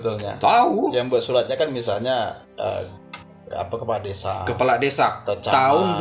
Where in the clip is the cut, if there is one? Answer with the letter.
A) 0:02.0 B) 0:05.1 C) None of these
C